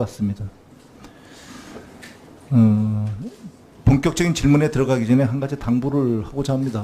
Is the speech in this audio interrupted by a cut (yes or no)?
yes